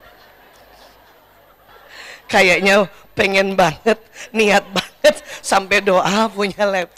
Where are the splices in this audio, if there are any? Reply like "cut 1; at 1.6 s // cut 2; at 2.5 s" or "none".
cut 1; at 1.7 s